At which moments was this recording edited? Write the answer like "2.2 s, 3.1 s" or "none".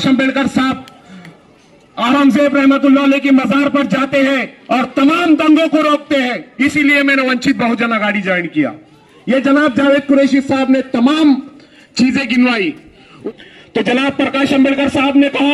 13.1 s